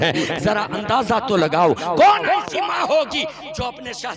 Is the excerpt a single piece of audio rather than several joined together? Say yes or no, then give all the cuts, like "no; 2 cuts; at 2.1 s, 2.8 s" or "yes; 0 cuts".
yes; 0 cuts